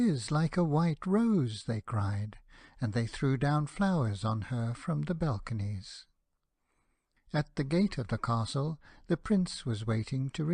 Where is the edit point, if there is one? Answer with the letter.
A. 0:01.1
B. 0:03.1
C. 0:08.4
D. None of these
B